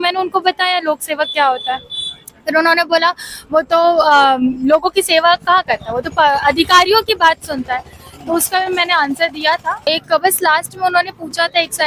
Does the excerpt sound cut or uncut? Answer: cut